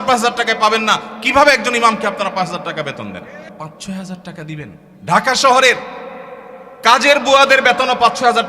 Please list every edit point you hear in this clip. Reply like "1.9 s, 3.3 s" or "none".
3.5 s, 4.9 s